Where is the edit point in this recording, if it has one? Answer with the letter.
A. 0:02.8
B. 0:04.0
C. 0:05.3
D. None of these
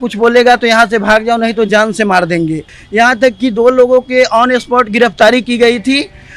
A